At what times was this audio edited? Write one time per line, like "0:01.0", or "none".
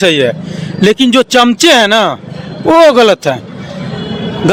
none